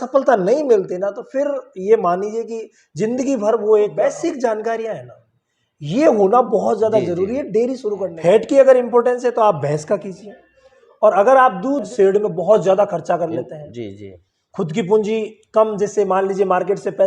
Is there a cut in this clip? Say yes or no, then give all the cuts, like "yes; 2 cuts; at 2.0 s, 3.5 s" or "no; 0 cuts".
yes; 3 cuts; at 4.0 s, 8.0 s, 11.9 s